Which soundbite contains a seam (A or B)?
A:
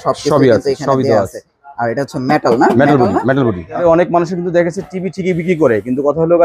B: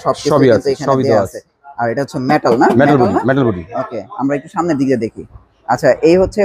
A